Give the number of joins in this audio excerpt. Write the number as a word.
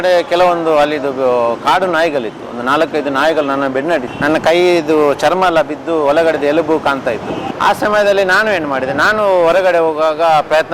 two